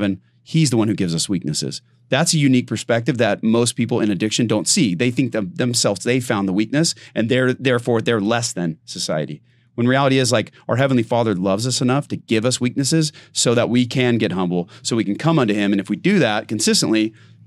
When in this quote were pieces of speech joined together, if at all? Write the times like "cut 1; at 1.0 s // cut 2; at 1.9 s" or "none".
none

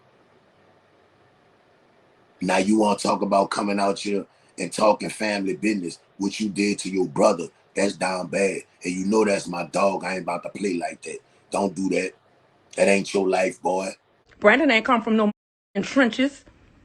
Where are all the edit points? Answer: cut 1; at 14.3 s

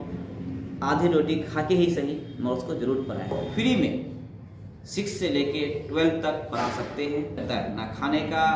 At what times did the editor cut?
cut 1; at 3.3 s // cut 2; at 7.4 s

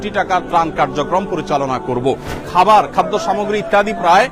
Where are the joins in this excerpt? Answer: cut 1; at 2.4 s

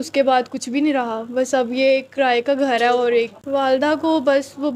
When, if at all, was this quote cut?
cut 1; at 3.4 s

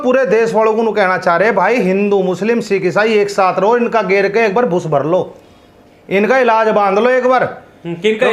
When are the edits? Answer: none

